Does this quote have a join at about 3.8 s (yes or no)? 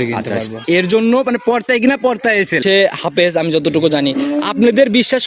no